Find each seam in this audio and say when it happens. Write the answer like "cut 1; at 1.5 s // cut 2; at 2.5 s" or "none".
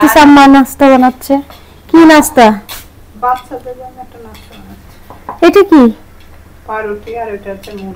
none